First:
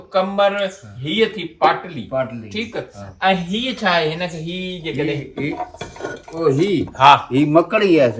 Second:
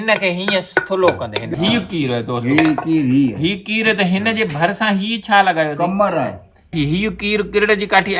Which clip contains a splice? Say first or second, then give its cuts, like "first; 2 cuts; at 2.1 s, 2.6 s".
second; 2 cuts; at 1.5 s, 6.7 s